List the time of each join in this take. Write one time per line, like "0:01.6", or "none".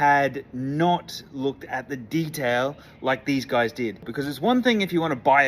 0:04.1